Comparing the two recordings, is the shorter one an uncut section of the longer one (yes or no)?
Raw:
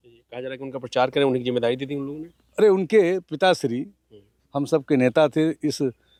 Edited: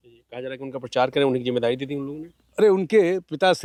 yes